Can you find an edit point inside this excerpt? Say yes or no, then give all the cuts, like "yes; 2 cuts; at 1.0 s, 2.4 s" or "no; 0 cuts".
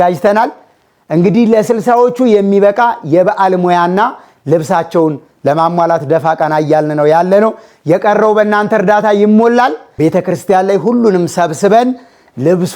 yes; 1 cut; at 9.8 s